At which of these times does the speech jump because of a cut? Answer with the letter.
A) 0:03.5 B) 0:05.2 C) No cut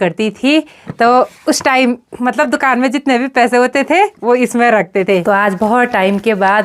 B